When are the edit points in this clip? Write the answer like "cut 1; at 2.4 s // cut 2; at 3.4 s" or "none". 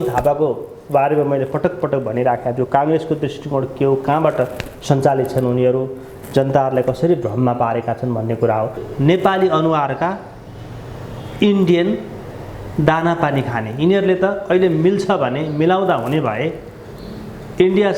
cut 1; at 8.8 s